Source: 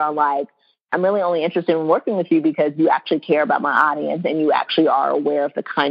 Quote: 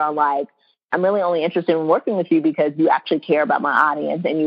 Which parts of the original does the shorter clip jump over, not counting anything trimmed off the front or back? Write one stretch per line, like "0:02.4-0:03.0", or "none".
none